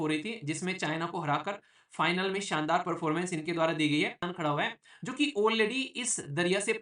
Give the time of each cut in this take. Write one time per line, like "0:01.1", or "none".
0:04.2